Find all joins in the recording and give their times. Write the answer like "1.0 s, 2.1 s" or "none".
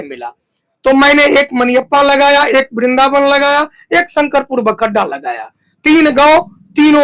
none